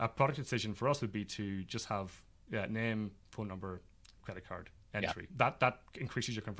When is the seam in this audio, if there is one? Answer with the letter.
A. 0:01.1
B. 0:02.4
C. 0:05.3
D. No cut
C